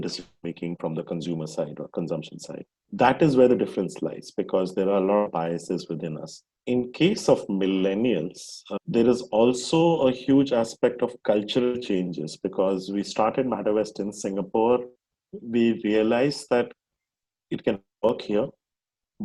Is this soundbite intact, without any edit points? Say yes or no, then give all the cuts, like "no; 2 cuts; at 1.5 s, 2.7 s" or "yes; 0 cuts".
yes; 0 cuts